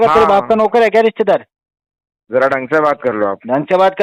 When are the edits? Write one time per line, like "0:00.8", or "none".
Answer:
none